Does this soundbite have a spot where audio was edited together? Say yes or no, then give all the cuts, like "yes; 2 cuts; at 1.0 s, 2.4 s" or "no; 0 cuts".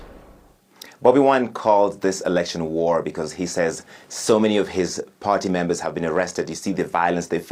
no; 0 cuts